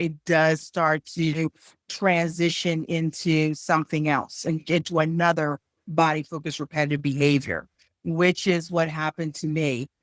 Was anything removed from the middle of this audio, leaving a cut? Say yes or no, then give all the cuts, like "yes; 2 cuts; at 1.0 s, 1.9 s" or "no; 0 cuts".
no; 0 cuts